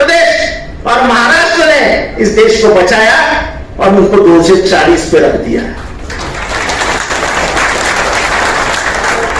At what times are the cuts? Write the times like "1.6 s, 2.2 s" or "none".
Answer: none